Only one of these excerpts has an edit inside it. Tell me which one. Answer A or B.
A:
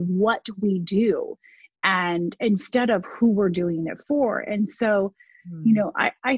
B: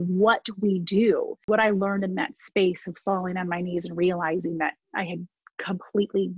B